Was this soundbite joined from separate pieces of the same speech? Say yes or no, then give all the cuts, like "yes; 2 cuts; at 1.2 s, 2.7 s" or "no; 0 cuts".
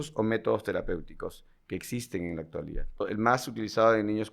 yes; 1 cut; at 3.0 s